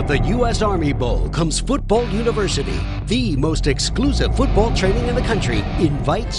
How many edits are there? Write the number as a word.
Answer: zero